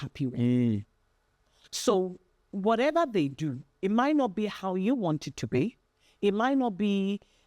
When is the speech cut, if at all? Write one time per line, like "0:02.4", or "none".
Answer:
none